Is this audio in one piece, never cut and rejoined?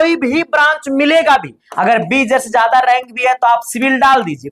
no; 1 cut; at 1.6 s

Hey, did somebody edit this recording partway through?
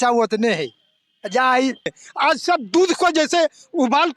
yes; 1 cut; at 1.9 s

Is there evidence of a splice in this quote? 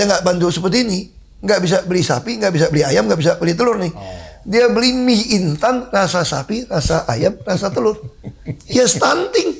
no; 0 cuts

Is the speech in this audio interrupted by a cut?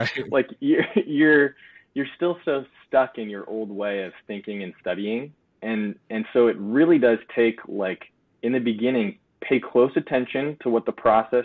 no; 0 cuts

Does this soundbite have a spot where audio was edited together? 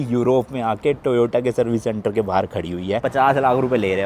yes; 1 cut; at 3.0 s

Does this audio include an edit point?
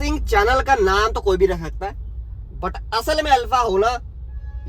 no; 0 cuts

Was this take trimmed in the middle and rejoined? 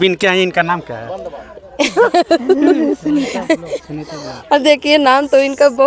no; 0 cuts

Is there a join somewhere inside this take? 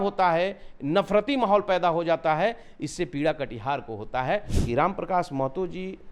yes; 1 cut; at 4.5 s

